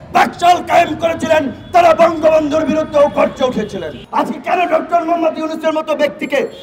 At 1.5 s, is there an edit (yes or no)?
no